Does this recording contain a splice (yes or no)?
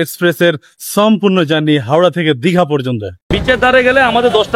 yes